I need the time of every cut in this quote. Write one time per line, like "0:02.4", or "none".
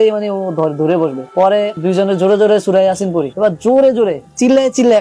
0:01.7